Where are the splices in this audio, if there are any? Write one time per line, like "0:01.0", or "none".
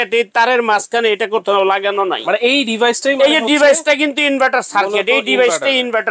none